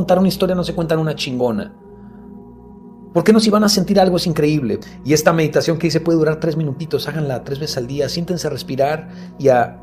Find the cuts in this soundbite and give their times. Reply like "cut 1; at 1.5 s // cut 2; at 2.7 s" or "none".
none